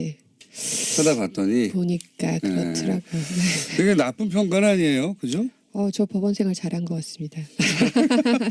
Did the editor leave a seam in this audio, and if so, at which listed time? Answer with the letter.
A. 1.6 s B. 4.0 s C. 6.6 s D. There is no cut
B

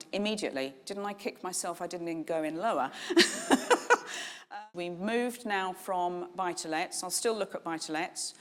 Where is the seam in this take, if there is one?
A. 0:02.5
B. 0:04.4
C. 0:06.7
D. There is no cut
B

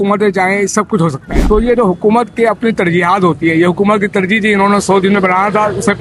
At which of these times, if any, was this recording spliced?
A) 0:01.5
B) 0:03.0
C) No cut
A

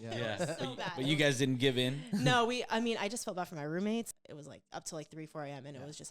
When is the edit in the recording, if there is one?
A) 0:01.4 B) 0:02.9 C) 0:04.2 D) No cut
C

